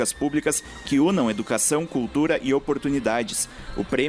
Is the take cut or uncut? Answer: uncut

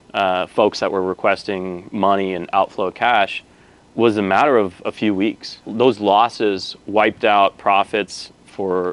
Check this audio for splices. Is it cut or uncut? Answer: uncut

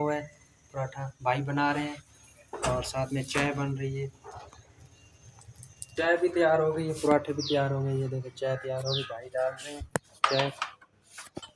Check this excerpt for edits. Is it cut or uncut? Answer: cut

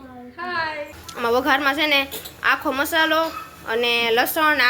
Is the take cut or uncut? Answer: cut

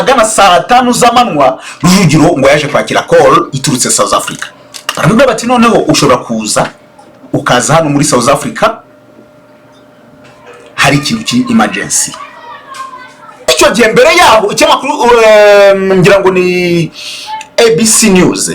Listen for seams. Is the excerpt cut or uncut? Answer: cut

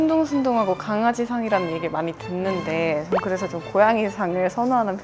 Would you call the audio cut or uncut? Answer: uncut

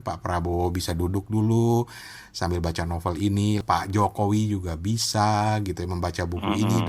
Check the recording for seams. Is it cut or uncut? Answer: cut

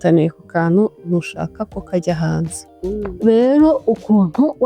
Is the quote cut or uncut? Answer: cut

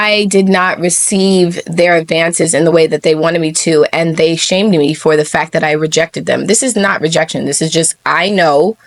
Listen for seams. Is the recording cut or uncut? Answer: uncut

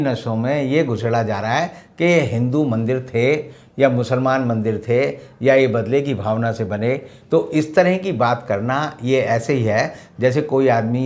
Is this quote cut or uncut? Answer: uncut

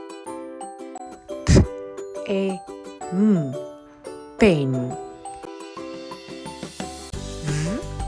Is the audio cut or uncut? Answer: uncut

